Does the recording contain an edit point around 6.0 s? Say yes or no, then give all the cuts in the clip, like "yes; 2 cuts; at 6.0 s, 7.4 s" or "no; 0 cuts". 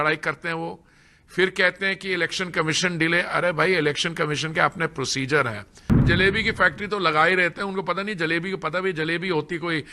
yes; 1 cut; at 6.0 s